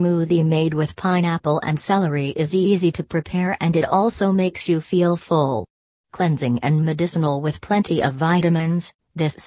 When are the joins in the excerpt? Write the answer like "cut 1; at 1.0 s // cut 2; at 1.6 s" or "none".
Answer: cut 1; at 8.1 s